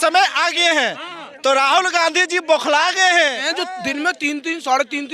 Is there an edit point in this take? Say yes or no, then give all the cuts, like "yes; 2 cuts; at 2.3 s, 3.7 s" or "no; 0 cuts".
yes; 1 cut; at 3.4 s